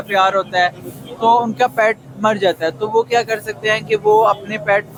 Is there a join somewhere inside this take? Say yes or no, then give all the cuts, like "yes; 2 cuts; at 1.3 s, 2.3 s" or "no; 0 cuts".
no; 0 cuts